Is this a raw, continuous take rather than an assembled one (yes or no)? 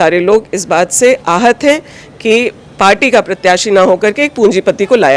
yes